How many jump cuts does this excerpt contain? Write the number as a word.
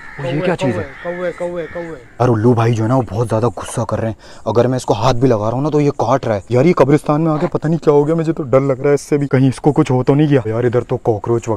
three